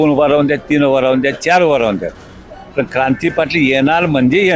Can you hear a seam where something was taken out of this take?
no; 0 cuts

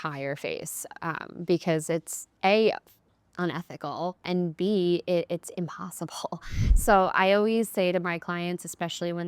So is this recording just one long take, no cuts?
no; 1 cut; at 4.2 s

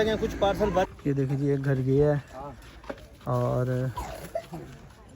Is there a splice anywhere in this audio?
yes; 1 cut; at 0.9 s

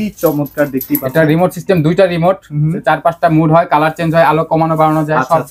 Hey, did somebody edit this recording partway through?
no; 0 cuts

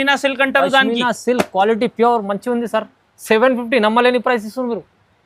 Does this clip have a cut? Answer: no; 0 cuts

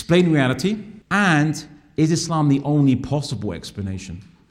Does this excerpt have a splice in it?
yes; 1 cut; at 0.9 s

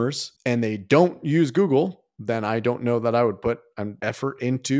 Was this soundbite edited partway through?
yes; 1 cut; at 3.9 s

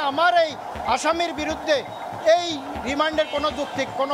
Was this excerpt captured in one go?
yes; 0 cuts

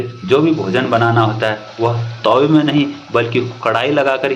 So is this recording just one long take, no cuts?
yes; 0 cuts

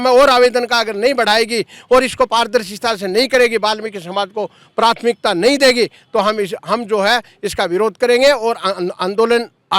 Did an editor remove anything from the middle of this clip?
no; 0 cuts

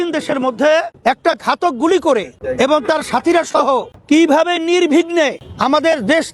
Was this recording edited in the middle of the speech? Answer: yes; 4 cuts; at 0.9 s, 2.4 s, 3.9 s, 5.5 s

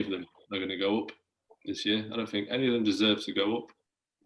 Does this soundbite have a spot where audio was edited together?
no; 0 cuts

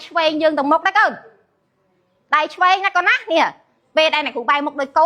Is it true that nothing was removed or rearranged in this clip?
yes; 0 cuts

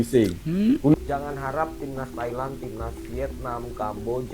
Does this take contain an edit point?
yes; 1 cut; at 0.9 s

